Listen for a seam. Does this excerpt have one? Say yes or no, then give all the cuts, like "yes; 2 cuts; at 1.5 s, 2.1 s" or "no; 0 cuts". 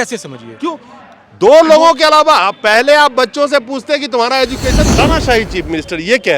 yes; 1 cut; at 4.8 s